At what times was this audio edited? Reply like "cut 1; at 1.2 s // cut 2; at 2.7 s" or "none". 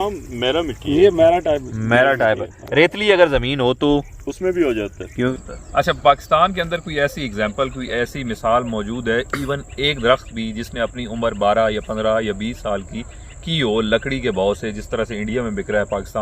cut 1; at 5.3 s